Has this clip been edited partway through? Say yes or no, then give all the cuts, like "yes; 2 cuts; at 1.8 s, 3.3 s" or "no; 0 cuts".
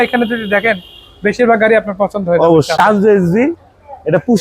yes; 1 cut; at 2.7 s